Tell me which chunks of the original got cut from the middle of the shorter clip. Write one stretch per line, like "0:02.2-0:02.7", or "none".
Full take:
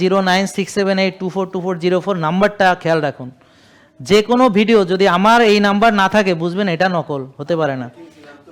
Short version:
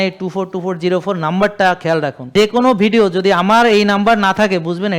0:03.2-0:04.0